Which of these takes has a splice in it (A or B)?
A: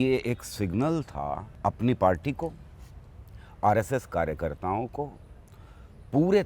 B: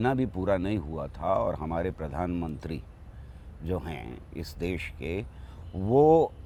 A